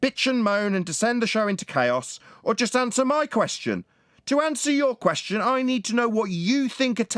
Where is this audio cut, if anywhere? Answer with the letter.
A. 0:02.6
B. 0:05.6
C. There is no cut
C